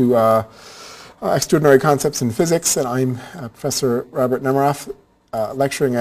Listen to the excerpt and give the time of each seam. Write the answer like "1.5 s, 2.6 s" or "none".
2.9 s